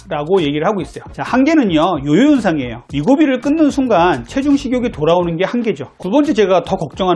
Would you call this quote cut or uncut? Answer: cut